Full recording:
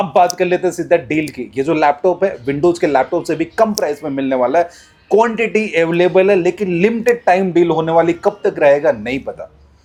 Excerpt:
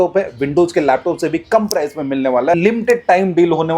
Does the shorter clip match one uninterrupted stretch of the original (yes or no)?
no